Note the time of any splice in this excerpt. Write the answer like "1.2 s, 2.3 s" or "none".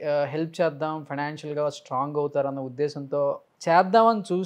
3.5 s

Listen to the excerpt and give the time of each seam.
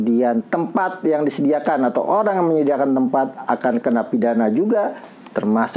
none

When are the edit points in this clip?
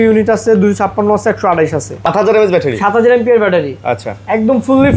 2.0 s

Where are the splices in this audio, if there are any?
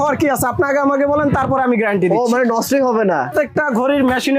3.3 s

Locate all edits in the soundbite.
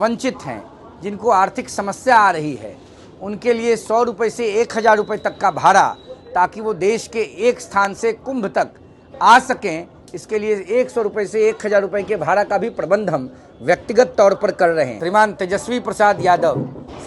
15.0 s

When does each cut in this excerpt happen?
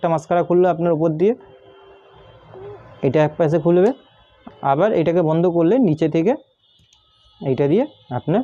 none

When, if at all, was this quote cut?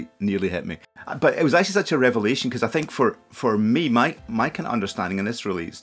1.0 s, 4.2 s

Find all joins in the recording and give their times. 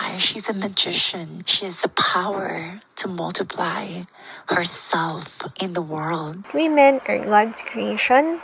1.4 s, 5.4 s, 6.4 s

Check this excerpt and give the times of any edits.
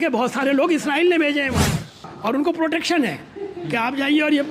2.0 s

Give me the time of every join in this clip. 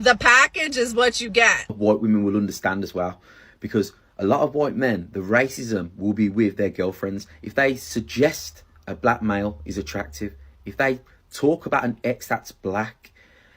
1.7 s

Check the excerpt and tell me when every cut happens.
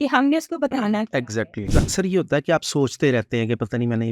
1.7 s

